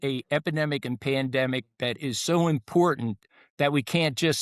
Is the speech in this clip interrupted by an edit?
no; 0 cuts

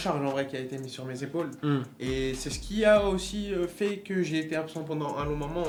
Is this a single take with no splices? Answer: yes; 0 cuts

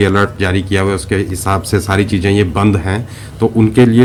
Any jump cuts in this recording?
no; 0 cuts

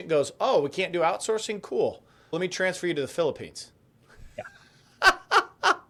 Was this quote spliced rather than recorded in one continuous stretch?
no; 0 cuts

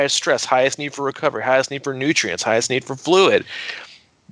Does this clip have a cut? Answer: no; 0 cuts

